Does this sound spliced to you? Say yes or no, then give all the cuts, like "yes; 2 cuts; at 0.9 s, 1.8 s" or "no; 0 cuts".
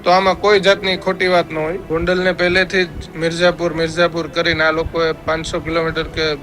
yes; 1 cut; at 1.8 s